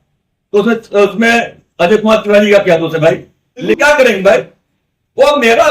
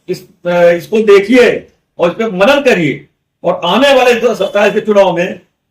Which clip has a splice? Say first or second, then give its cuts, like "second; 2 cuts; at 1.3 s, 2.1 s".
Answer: first; 1 cut; at 3.6 s